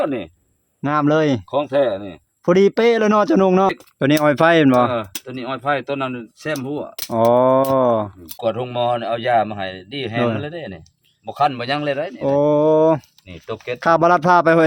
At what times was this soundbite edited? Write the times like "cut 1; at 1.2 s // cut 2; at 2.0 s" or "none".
cut 1; at 3.8 s // cut 2; at 8.3 s